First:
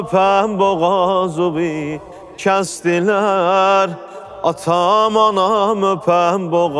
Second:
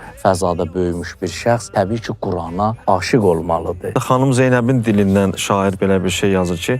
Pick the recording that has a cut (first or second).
second